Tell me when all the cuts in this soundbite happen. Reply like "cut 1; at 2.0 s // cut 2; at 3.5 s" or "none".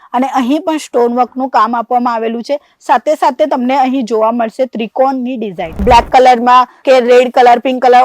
cut 1; at 5.8 s